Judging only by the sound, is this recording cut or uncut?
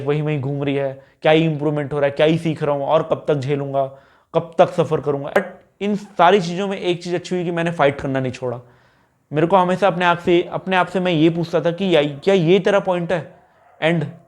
cut